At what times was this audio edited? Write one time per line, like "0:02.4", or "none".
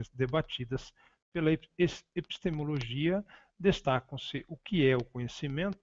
0:02.5